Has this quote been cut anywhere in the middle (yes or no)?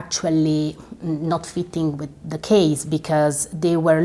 no